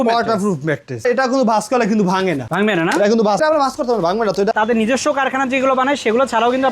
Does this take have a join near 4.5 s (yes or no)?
yes